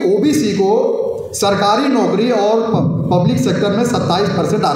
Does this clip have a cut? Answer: no; 0 cuts

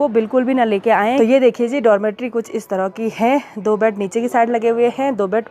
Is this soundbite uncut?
no; 1 cut; at 1.2 s

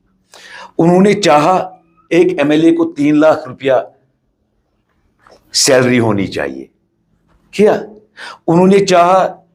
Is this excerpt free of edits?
yes; 0 cuts

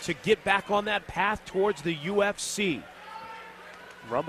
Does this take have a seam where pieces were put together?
no; 0 cuts

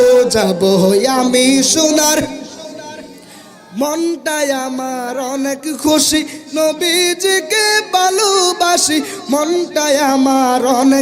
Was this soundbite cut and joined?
no; 0 cuts

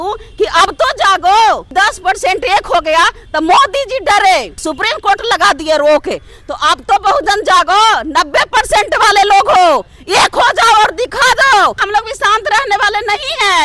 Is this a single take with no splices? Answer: no; 3 cuts; at 1.7 s, 4.6 s, 11.8 s

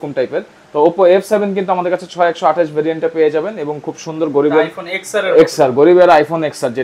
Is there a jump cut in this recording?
no; 0 cuts

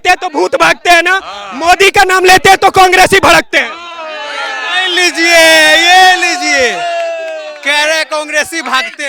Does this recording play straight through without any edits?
yes; 0 cuts

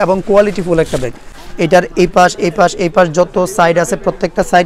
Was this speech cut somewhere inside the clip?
yes; 1 cut; at 1.2 s

